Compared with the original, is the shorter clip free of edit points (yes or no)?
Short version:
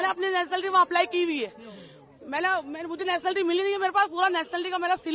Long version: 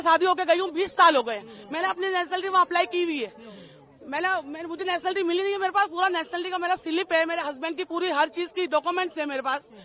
yes